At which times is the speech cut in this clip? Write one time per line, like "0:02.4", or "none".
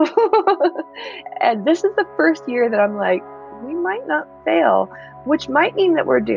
none